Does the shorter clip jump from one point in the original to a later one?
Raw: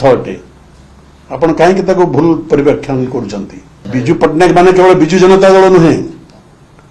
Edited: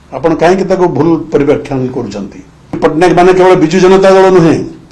yes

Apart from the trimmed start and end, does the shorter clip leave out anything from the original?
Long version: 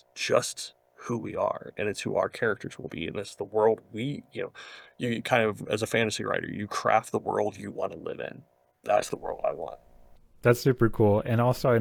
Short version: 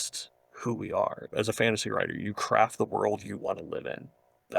yes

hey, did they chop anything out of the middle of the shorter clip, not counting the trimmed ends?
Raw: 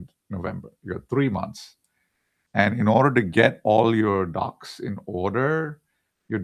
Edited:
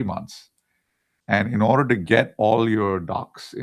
no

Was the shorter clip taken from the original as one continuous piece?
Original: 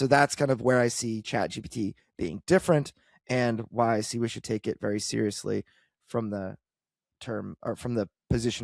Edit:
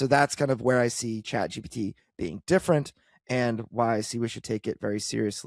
yes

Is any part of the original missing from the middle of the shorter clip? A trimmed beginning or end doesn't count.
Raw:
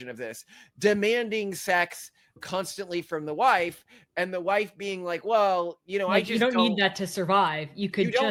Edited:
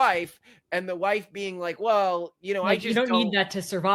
no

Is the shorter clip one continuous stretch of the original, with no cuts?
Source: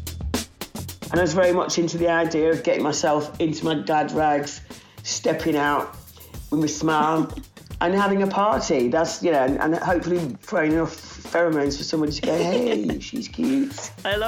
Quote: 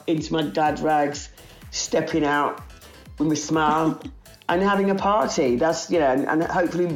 yes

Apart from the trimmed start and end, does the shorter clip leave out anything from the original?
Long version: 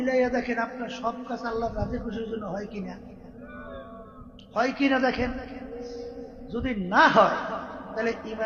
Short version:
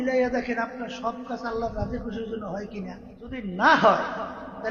yes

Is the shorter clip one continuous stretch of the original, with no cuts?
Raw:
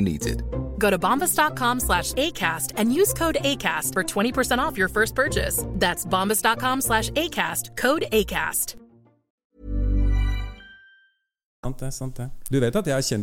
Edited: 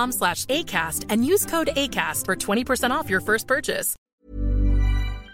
no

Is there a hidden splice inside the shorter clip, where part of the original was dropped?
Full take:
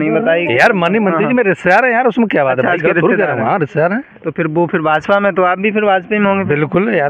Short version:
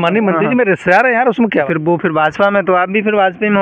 yes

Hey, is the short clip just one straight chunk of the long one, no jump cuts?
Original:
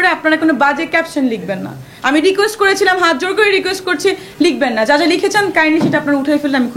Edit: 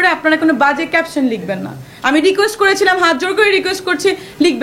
yes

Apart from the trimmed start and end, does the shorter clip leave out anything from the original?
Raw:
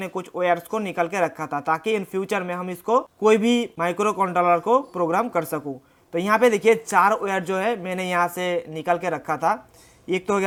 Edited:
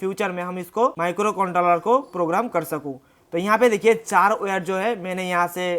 yes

